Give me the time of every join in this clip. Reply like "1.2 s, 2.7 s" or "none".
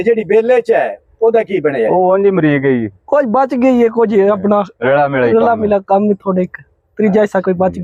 none